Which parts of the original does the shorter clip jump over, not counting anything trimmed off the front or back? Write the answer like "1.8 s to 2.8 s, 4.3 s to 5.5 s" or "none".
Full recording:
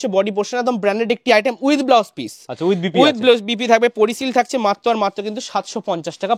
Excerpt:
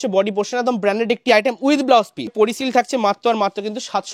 2.3 s to 3.9 s